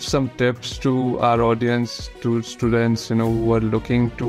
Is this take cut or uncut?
uncut